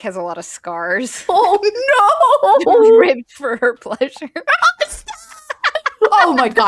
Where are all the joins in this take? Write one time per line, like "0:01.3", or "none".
0:01.2
0:04.4